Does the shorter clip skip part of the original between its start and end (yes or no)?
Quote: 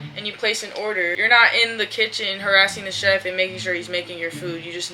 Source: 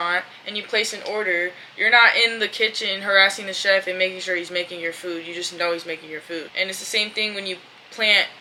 yes